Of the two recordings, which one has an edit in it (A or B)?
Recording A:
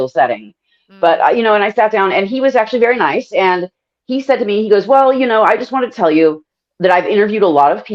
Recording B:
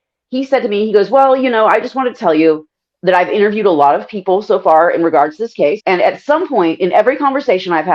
B